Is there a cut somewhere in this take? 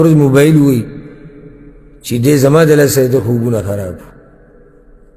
no; 0 cuts

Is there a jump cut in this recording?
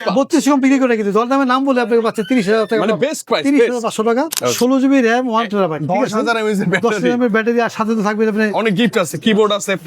yes; 1 cut; at 4.5 s

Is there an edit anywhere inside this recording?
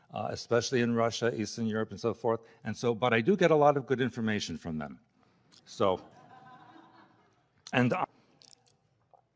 no; 0 cuts

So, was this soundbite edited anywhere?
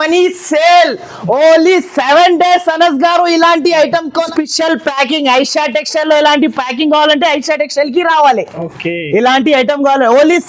yes; 1 cut; at 4.3 s

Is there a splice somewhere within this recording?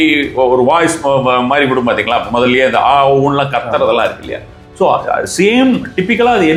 no; 0 cuts

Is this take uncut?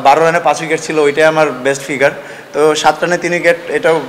yes; 0 cuts

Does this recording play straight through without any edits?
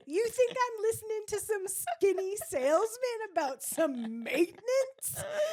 yes; 0 cuts

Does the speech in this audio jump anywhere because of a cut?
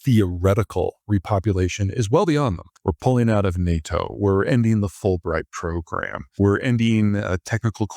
yes; 2 cuts; at 2.7 s, 6.2 s

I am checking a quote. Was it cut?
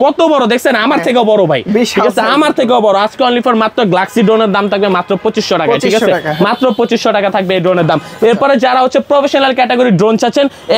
no; 0 cuts

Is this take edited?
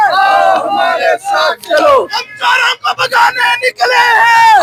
no; 0 cuts

